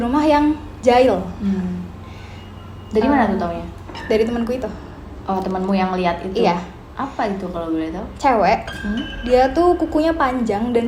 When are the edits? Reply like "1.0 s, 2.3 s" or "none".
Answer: none